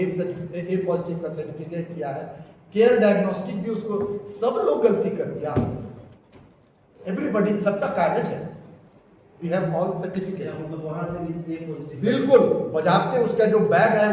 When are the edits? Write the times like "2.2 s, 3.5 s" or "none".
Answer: none